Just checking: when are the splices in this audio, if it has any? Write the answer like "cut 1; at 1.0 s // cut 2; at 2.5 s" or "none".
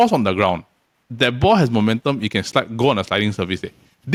none